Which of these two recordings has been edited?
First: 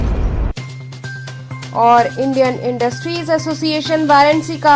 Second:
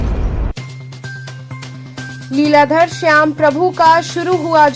second; 1 cut; at 1.1 s

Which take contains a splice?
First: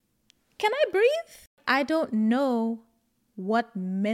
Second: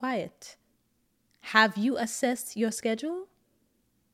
first; 1 cut; at 1.6 s

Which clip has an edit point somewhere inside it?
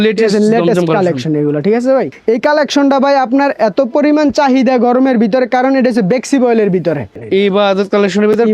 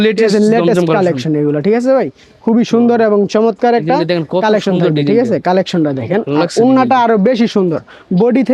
first; 2 cuts; at 2.1 s, 7.1 s

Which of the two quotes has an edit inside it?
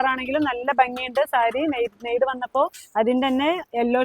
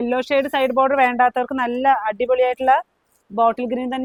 first; 1 cut; at 2.8 s

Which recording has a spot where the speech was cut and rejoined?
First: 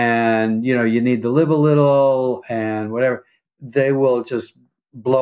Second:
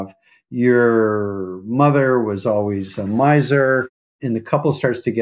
second; 1 cut; at 4.1 s

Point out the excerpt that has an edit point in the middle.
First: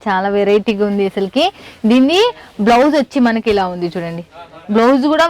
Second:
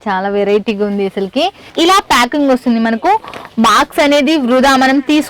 second; 1 cut; at 1.7 s

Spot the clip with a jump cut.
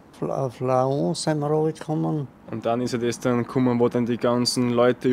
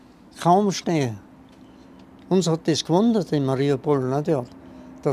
first; 1 cut; at 2.4 s

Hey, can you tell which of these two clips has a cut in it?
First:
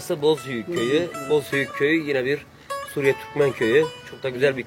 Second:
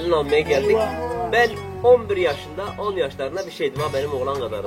first; 1 cut; at 1.2 s

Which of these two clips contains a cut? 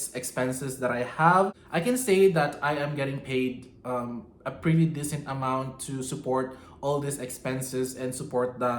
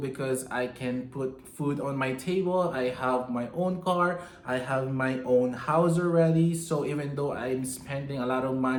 first; 1 cut; at 1.9 s

